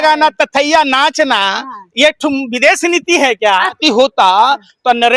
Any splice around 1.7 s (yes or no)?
no